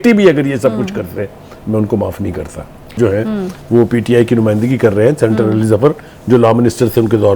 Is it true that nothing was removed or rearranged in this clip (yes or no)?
no